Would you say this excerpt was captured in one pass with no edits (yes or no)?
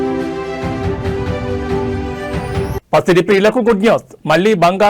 no